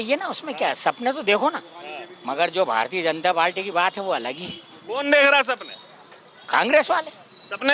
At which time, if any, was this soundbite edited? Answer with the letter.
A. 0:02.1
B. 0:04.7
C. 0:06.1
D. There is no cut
D